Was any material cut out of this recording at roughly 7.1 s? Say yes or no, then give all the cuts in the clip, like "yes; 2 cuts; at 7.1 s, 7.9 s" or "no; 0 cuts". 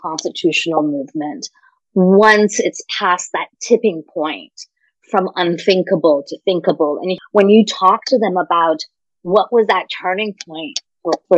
yes; 1 cut; at 7.1 s